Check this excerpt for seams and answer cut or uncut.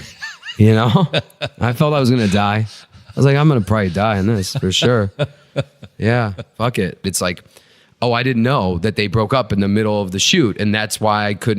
cut